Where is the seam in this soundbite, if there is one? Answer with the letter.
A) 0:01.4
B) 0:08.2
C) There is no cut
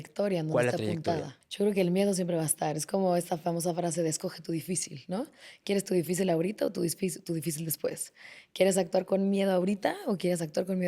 A